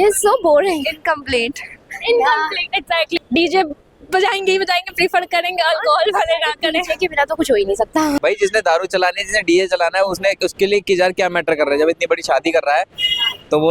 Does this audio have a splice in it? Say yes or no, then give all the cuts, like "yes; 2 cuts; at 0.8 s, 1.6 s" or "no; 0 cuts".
yes; 2 cuts; at 3.2 s, 8.2 s